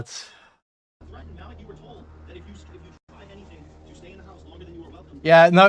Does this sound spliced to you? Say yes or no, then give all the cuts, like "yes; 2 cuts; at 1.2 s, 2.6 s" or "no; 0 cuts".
no; 0 cuts